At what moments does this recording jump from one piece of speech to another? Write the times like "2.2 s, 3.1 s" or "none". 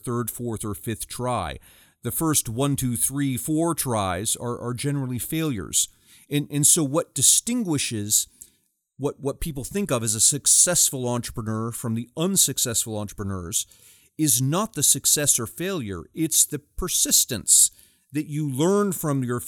none